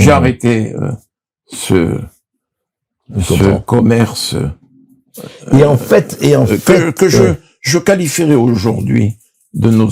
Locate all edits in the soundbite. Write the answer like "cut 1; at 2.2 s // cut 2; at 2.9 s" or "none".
none